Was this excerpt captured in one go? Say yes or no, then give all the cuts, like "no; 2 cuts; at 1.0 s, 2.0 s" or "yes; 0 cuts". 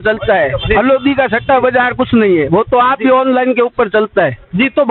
yes; 0 cuts